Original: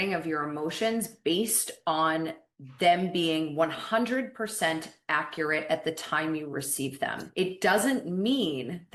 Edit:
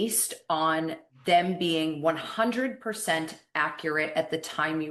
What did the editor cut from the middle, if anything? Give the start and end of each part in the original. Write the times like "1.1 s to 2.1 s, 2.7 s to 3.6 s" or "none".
2.4 s to 2.6 s